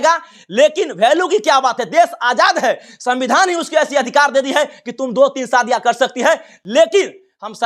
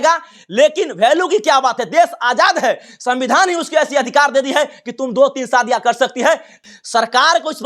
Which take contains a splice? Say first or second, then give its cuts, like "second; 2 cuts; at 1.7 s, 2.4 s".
second; 1 cut; at 6.6 s